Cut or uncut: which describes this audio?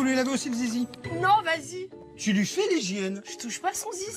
cut